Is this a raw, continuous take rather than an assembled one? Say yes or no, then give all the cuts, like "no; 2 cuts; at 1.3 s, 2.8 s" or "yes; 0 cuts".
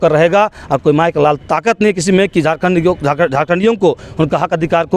yes; 0 cuts